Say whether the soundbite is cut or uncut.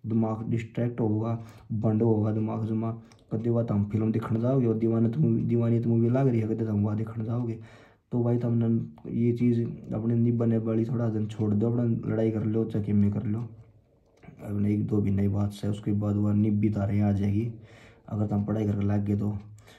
uncut